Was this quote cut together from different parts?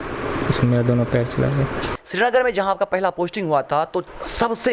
yes; 1 cut; at 2.0 s

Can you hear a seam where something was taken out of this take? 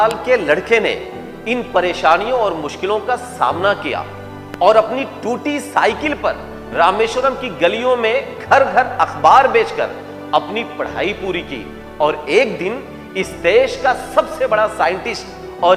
no; 0 cuts

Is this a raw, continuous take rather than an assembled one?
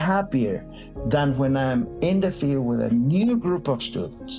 yes; 0 cuts

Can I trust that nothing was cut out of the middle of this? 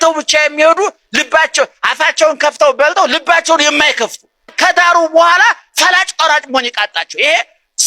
no; 1 cut; at 4.5 s

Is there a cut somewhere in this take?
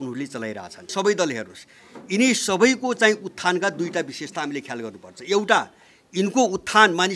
yes; 1 cut; at 0.9 s

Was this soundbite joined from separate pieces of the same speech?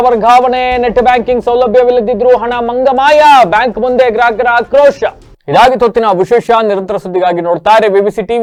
no; 0 cuts

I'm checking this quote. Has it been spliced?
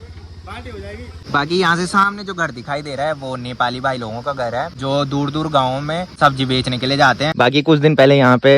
yes; 4 cuts; at 1.2 s, 4.7 s, 6.1 s, 7.3 s

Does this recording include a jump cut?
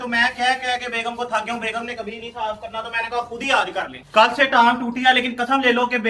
yes; 1 cut; at 4.0 s

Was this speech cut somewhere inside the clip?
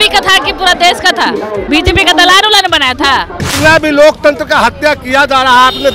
yes; 2 cuts; at 1.6 s, 3.4 s

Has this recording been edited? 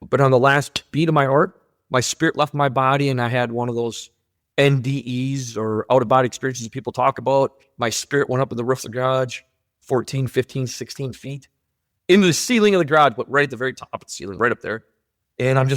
no; 0 cuts

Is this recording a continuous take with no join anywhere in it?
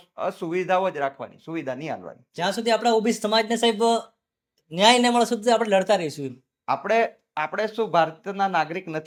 yes; 0 cuts

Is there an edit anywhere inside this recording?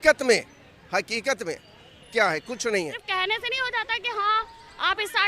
yes; 1 cut; at 3.0 s

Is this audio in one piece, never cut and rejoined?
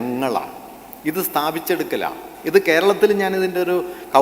yes; 0 cuts

